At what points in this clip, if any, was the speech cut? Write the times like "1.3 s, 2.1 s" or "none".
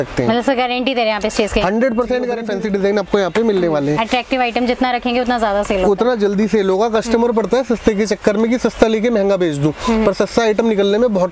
2.4 s